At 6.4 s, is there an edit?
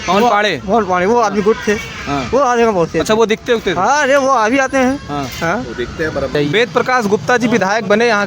yes; 1 cut; at 6.4 s

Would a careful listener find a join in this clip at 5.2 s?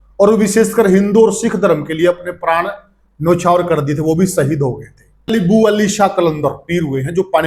yes; 1 cut; at 5.2 s

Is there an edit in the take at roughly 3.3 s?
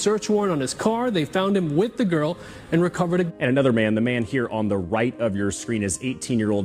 yes; 1 cut; at 3.3 s

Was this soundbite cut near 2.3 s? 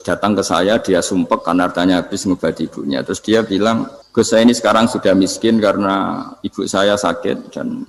no; 1 cut; at 4.0 s

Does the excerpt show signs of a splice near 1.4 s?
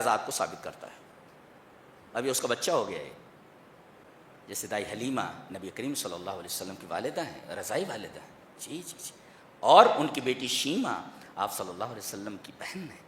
no; 0 cuts

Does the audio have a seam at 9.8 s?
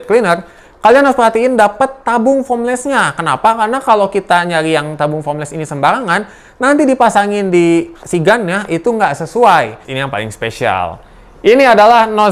yes; 1 cut; at 9.8 s

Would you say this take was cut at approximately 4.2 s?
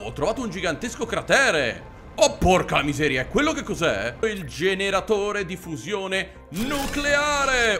yes; 1 cut; at 4.2 s

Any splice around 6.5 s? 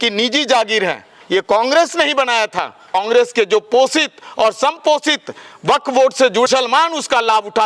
yes; 2 cuts; at 3.0 s, 6.5 s

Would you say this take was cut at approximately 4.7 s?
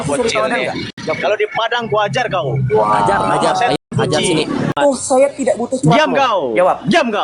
yes; 1 cut; at 4.7 s

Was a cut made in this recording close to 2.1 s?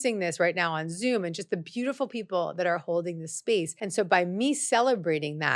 no; 1 cut; at 3.8 s

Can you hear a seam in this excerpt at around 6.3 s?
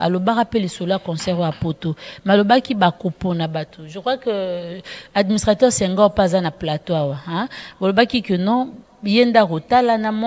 no; 0 cuts

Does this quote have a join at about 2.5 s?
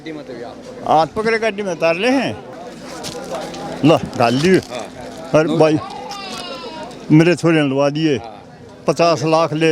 yes; 1 cut; at 2.5 s

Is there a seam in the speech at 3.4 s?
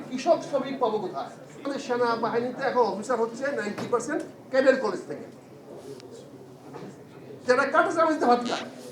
no; 1 cut; at 1.7 s

